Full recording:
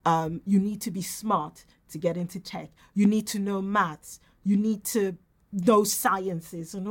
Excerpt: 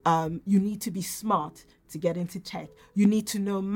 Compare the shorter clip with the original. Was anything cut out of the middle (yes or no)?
no